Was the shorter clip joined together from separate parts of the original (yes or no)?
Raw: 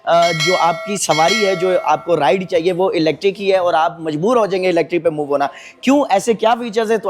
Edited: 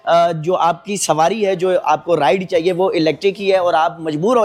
no